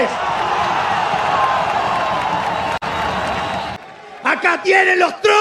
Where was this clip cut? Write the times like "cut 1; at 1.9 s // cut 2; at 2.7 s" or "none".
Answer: cut 1; at 3.8 s